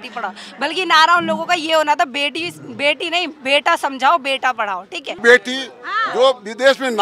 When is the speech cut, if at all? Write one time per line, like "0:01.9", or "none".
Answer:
0:05.2